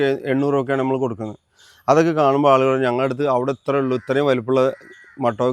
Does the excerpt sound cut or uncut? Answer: uncut